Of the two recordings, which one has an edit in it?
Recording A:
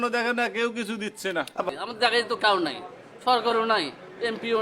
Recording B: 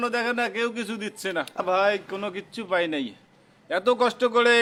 A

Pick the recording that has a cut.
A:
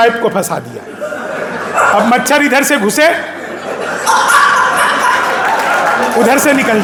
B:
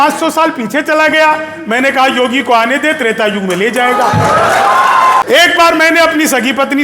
B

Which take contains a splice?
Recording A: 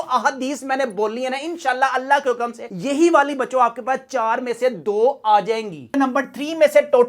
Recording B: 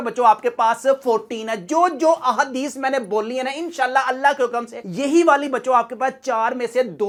A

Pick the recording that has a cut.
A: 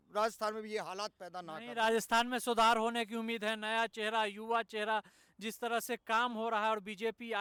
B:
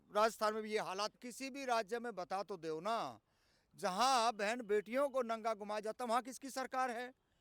B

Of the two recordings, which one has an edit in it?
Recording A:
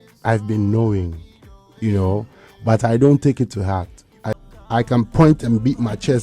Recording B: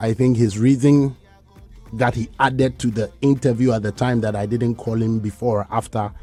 A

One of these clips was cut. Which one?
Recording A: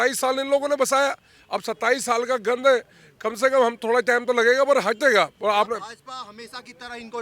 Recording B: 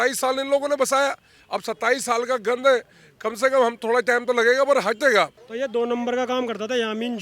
B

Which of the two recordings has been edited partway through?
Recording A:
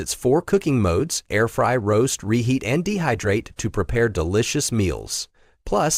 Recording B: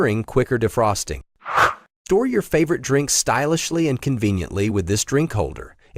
B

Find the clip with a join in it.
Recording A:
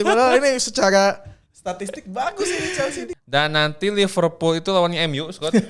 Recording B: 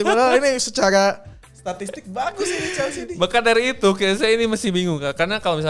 A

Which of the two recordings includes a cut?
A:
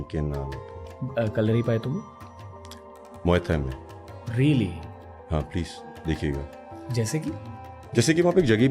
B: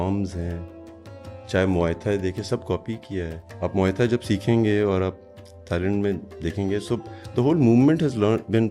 B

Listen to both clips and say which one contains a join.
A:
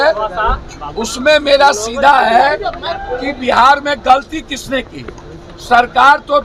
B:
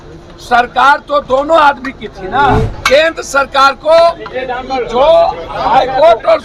B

